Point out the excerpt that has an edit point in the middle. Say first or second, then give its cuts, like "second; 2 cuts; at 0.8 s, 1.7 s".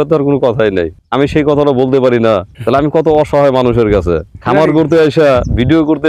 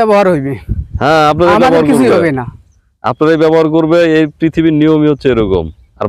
first; 3 cuts; at 1.0 s, 2.5 s, 4.3 s